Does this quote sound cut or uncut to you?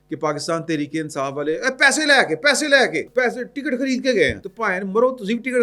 cut